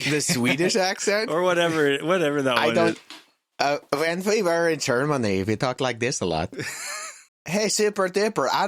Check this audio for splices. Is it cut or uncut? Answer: cut